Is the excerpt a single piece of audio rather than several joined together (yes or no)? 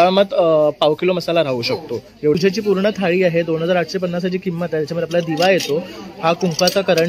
no